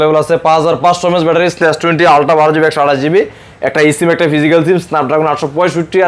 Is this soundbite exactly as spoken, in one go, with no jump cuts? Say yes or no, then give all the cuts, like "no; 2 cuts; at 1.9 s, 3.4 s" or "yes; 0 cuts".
no; 1 cut; at 1.6 s